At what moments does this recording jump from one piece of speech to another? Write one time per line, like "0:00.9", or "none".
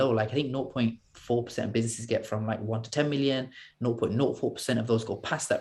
none